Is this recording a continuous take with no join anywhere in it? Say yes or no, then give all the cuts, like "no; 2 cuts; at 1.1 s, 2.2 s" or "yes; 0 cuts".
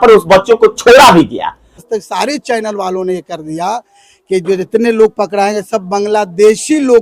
no; 1 cut; at 1.6 s